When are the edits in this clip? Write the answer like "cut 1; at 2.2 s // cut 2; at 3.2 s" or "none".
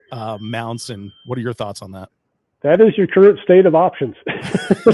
none